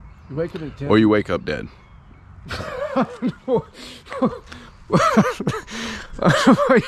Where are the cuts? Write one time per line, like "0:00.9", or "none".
none

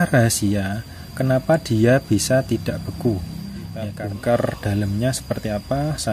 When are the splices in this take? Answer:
0:03.9

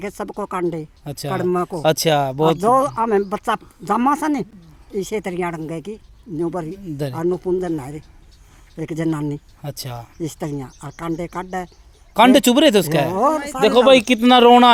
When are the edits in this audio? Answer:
none

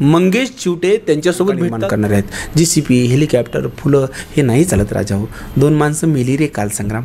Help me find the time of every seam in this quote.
0:01.8

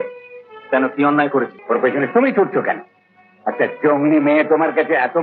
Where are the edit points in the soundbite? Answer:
0:01.6

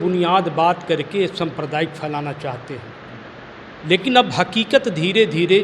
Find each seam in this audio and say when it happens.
none

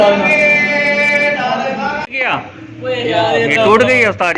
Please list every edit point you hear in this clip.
0:02.1

